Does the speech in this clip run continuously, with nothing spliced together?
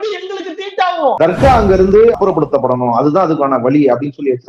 no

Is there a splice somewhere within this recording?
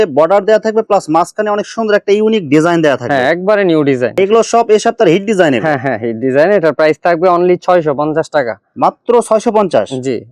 no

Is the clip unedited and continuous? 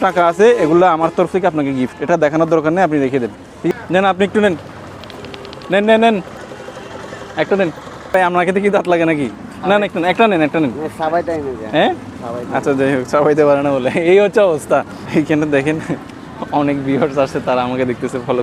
no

